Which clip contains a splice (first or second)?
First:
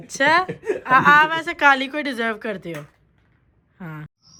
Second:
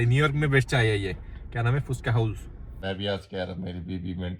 second